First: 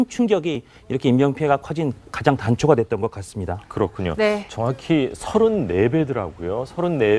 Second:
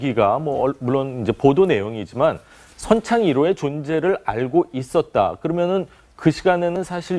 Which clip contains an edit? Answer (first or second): first